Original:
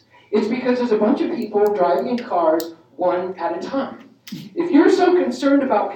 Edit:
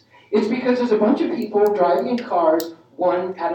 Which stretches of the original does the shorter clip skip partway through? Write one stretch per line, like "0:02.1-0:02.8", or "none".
none